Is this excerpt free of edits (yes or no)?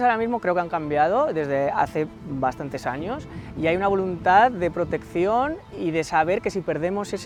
yes